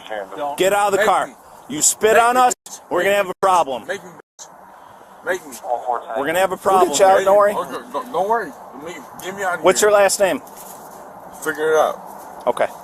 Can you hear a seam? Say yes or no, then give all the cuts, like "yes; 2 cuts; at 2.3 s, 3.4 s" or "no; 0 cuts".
yes; 1 cut; at 6.9 s